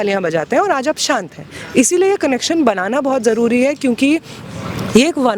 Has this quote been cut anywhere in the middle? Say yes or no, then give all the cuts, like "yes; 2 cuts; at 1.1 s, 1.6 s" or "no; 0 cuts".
no; 0 cuts